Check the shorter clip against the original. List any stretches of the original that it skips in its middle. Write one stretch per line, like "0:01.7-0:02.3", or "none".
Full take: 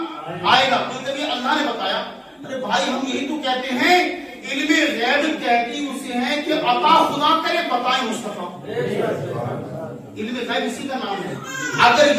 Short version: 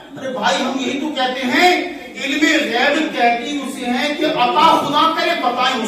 none